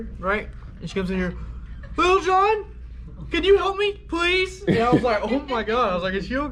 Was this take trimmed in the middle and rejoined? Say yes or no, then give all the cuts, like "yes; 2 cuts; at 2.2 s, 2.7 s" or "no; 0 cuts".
no; 0 cuts